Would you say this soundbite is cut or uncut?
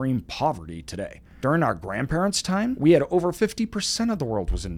cut